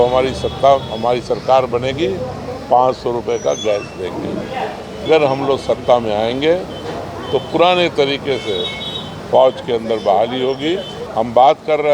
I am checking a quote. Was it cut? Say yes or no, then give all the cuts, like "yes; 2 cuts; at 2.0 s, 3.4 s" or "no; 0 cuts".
yes; 2 cuts; at 5.1 s, 11.0 s